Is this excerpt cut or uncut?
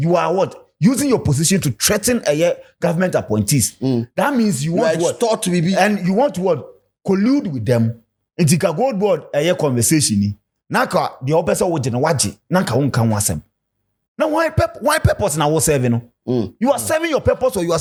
uncut